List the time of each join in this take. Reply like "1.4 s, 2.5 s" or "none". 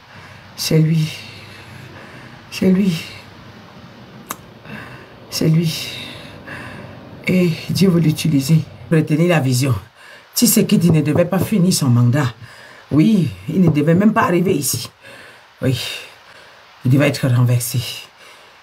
8.9 s